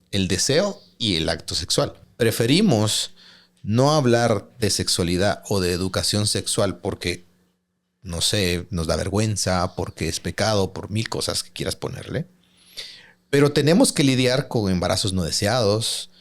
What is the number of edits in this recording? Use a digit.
1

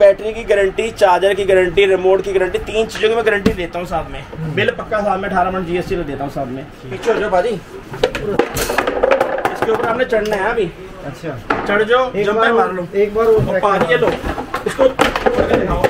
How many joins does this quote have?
0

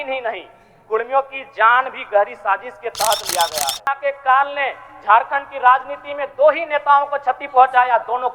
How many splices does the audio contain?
1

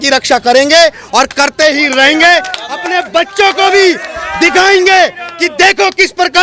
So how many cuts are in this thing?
0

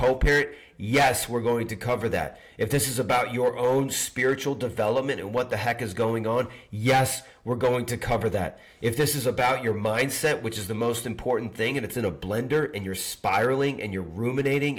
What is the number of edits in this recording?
0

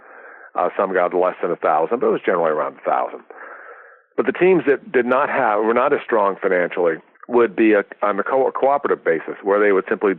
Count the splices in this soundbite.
1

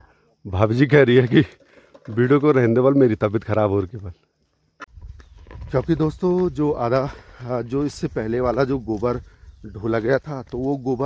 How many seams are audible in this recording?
1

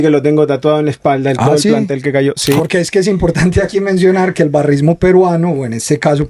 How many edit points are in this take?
1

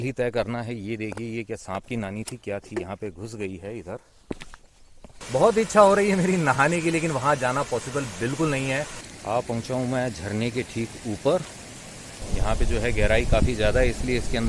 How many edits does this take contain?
3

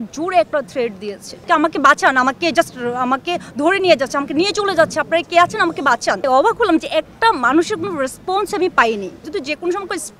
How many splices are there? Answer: 3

